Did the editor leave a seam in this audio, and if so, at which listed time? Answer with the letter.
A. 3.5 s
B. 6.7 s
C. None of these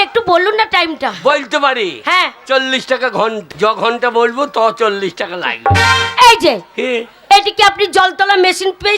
A